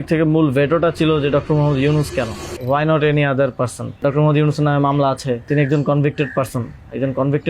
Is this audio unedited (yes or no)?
no